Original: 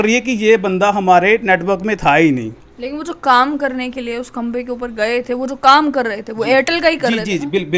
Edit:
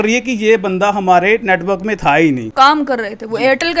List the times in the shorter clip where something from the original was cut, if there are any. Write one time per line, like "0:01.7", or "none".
0:02.5